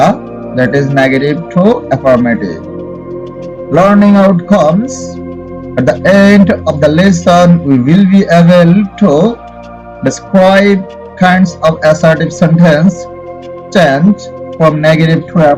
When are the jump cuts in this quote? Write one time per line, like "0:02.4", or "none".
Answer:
none